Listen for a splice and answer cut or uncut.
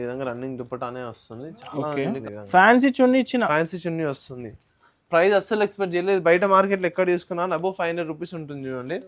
cut